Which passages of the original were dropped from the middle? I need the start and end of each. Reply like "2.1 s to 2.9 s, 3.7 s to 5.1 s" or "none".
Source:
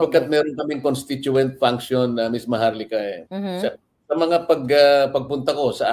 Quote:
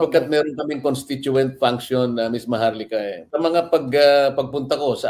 3.2 s to 3.9 s